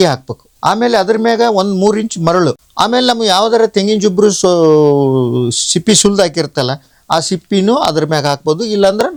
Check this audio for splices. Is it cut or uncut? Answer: uncut